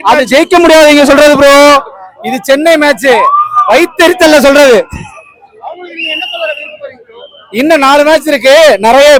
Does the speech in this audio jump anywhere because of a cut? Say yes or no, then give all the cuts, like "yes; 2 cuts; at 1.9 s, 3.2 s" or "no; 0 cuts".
no; 0 cuts